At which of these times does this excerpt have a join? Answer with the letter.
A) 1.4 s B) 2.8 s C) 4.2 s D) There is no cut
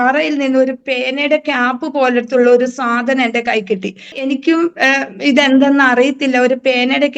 C